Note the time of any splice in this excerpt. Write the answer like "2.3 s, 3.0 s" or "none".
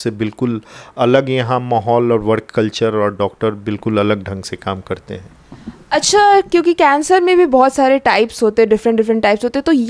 none